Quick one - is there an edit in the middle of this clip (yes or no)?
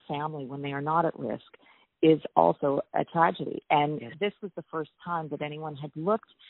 yes